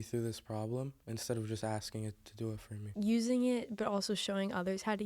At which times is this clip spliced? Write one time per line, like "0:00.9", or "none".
0:02.8